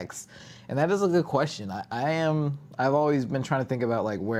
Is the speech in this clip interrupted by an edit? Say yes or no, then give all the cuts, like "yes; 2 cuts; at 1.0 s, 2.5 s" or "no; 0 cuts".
no; 0 cuts